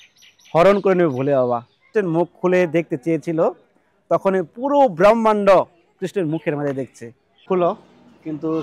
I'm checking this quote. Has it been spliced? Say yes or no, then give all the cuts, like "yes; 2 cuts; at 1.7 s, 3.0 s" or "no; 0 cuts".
yes; 2 cuts; at 1.8 s, 7.4 s